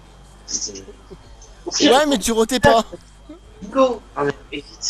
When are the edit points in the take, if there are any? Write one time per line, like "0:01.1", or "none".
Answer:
none